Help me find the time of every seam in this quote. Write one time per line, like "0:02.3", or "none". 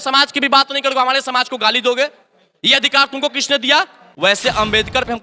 0:04.0